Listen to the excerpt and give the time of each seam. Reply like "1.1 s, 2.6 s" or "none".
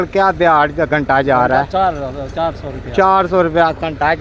none